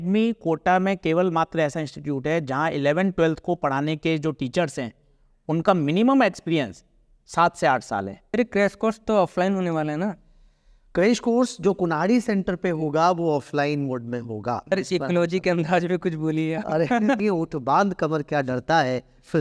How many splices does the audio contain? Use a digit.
3